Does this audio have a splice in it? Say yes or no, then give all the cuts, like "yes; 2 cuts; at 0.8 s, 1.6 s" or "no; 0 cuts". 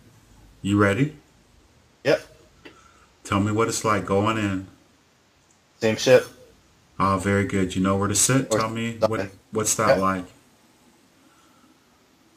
no; 0 cuts